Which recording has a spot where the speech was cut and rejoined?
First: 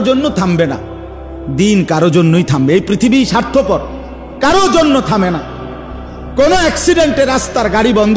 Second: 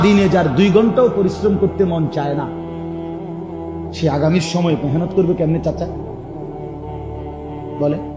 second; 2 cuts; at 2.5 s, 3.6 s

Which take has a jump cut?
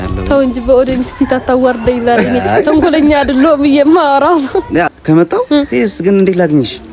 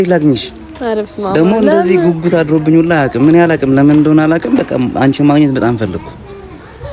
first; 1 cut; at 4.9 s

